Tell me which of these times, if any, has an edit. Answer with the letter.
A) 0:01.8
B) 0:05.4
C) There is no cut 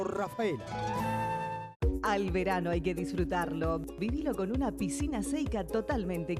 A